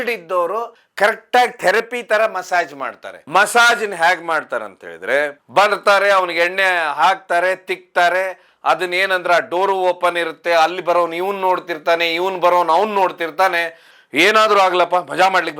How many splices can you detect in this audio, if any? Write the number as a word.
two